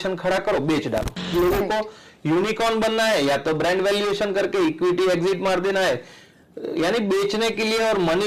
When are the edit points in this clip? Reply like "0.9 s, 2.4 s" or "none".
1.3 s